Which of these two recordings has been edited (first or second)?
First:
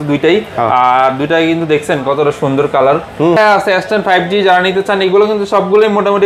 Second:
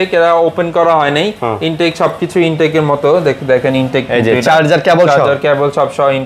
first